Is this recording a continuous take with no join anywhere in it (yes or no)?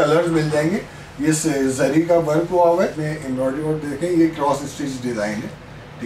no